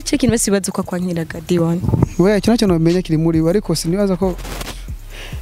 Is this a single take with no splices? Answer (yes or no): yes